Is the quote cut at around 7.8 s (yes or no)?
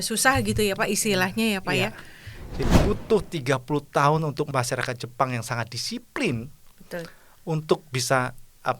no